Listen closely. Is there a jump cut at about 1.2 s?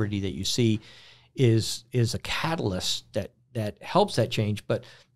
no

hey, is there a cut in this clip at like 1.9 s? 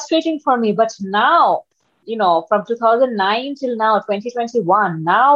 yes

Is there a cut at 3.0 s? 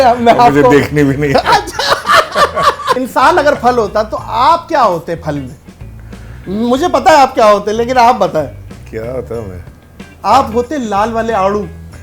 yes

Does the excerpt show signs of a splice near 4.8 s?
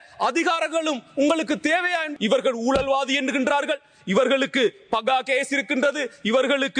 no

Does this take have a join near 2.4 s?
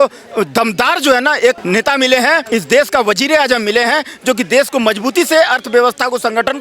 yes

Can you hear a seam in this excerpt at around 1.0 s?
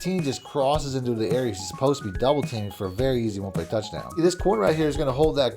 no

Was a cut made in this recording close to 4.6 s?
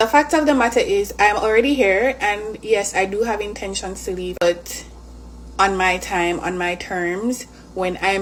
no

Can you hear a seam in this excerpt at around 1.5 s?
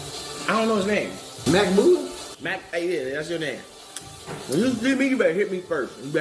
no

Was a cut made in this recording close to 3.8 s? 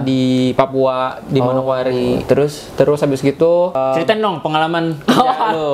yes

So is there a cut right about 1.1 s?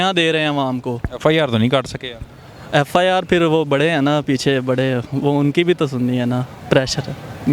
no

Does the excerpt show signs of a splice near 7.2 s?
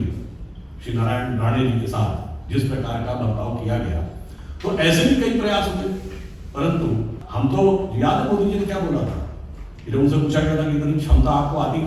yes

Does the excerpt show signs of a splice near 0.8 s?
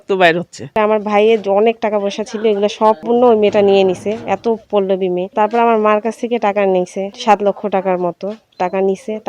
yes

